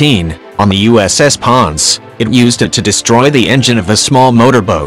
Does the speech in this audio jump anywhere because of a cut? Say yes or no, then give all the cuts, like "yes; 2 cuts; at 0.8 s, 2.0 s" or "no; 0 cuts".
no; 0 cuts